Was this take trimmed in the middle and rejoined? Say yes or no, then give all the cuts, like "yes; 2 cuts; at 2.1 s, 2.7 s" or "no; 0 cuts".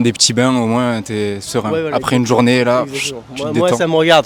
no; 0 cuts